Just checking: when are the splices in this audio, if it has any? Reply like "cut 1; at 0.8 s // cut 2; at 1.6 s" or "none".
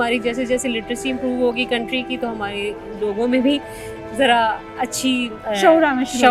none